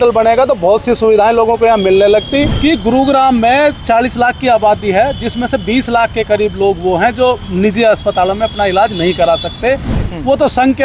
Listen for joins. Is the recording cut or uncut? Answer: cut